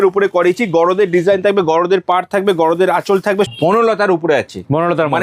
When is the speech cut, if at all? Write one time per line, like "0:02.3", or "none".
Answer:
0:03.5

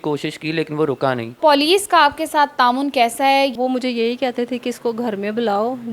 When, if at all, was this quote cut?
0:01.3
0:03.5

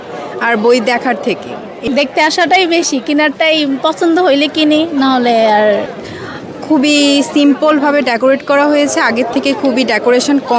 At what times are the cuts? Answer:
0:01.9
0:05.8

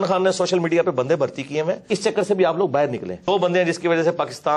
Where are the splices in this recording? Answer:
0:01.9
0:03.2

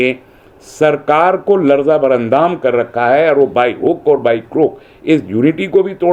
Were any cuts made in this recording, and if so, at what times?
none

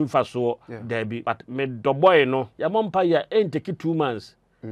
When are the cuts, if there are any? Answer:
0:01.2
0:02.5

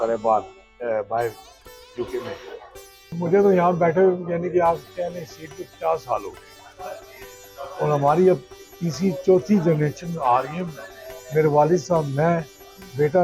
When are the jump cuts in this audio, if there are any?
0:03.1

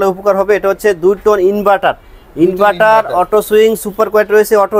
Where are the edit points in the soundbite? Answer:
none

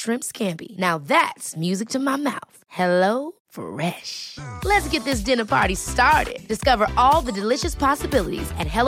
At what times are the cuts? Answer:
none

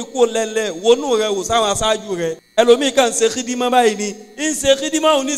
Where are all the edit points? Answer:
0:02.4

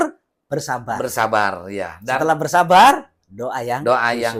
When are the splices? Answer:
none

